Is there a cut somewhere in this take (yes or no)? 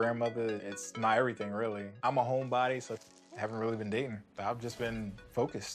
no